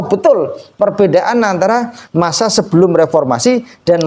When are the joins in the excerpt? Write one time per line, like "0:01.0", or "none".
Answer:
none